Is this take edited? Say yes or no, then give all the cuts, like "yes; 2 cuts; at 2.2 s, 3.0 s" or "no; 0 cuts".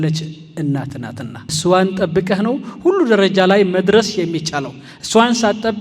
yes; 1 cut; at 1.5 s